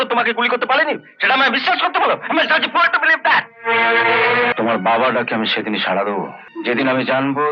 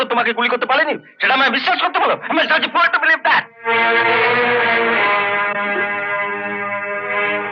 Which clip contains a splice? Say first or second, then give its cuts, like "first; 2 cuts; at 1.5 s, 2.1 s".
first; 2 cuts; at 4.5 s, 6.4 s